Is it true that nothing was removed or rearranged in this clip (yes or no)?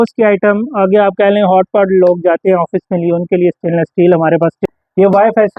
no